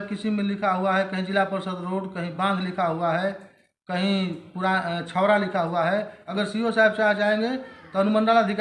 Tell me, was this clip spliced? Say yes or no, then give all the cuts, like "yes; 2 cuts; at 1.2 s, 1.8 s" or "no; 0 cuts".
yes; 1 cut; at 6.2 s